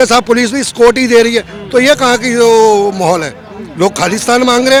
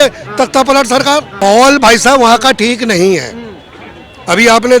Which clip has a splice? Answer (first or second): second